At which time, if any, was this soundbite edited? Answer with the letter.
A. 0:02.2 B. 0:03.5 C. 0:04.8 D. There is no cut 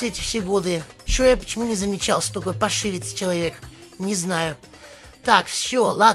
D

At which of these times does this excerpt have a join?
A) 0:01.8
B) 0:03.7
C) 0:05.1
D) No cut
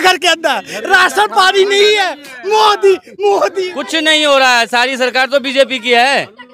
B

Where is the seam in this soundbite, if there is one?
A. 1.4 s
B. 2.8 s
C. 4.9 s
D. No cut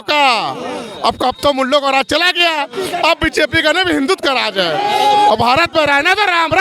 D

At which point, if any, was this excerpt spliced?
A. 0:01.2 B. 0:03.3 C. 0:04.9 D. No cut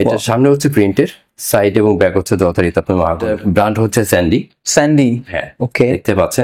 B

